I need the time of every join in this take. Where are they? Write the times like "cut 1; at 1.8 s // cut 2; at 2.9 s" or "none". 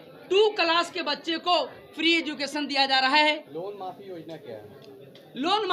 cut 1; at 3.5 s